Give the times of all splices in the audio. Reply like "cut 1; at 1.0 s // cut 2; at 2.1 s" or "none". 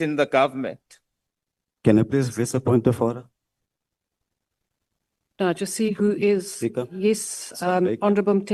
none